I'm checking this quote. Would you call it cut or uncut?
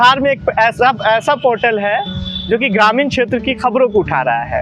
uncut